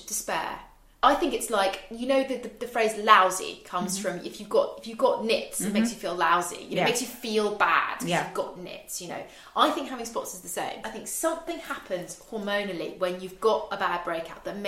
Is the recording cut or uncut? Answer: cut